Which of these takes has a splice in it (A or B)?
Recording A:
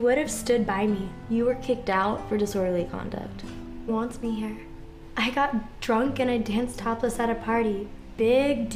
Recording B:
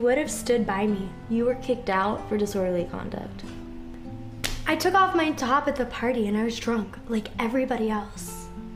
B